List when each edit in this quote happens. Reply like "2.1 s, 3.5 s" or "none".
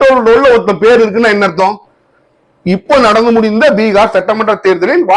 none